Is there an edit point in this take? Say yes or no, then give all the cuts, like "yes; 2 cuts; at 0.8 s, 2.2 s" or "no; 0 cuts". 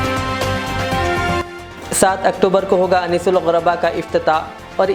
yes; 1 cut; at 1.4 s